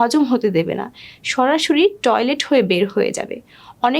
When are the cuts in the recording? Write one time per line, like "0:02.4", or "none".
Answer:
none